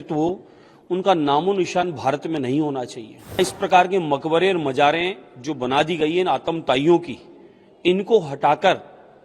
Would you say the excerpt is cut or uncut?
cut